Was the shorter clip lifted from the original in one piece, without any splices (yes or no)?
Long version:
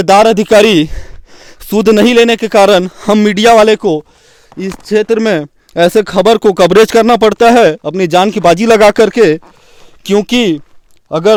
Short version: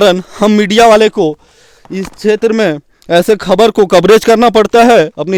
yes